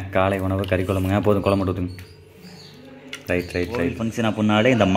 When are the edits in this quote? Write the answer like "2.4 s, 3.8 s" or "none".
4.1 s